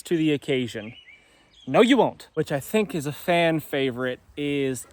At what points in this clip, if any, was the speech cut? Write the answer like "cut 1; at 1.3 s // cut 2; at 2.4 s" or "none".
cut 1; at 2.2 s